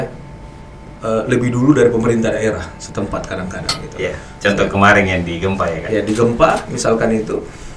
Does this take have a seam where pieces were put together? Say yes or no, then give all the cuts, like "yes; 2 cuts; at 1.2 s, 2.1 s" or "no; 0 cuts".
no; 0 cuts